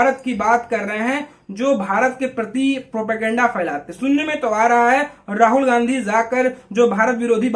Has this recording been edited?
no; 0 cuts

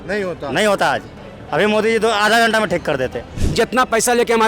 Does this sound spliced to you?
yes; 1 cut; at 3.4 s

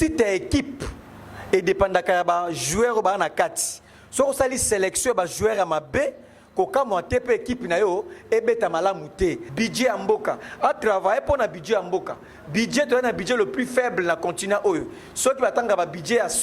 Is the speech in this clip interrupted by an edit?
yes; 1 cut; at 9.5 s

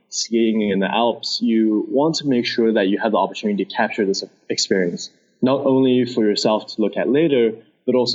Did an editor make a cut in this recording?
no; 0 cuts

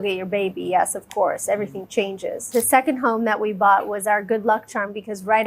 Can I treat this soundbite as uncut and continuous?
no; 1 cut; at 2.4 s

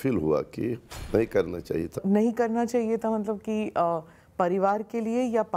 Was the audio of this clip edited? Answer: yes; 2 cuts; at 0.9 s, 2.0 s

